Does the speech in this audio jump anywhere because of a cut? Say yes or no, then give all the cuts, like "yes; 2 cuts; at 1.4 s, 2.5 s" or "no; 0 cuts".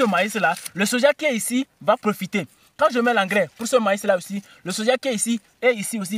no; 0 cuts